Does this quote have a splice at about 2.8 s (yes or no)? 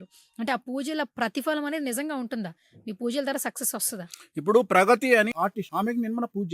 no